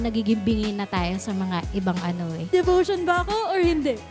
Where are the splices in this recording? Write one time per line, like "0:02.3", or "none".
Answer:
0:02.5